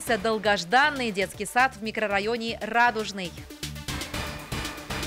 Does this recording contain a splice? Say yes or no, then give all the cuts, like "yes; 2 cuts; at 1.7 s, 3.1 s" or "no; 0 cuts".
yes; 1 cut; at 3.4 s